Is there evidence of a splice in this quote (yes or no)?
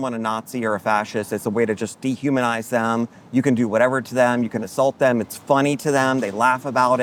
no